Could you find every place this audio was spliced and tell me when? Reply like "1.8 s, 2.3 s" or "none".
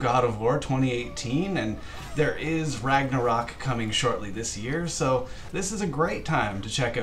none